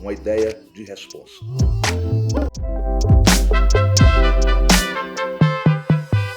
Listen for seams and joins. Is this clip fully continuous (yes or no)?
no